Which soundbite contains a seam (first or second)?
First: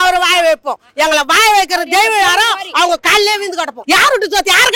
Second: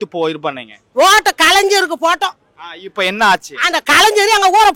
first